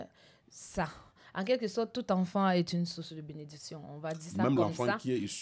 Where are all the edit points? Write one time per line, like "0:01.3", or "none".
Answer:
none